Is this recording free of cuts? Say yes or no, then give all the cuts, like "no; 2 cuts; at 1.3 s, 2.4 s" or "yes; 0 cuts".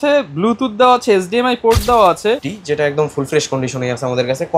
no; 1 cut; at 2.4 s